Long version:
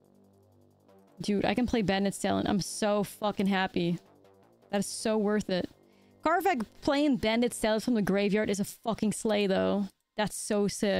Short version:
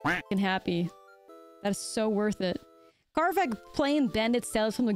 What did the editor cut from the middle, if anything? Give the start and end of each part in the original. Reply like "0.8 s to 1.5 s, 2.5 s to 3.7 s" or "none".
none